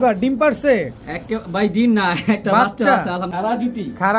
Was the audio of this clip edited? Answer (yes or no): yes